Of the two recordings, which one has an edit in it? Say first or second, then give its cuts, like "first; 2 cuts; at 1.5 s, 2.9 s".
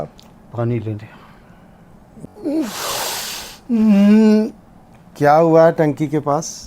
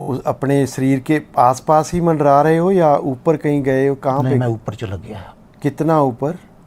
first; 1 cut; at 2.3 s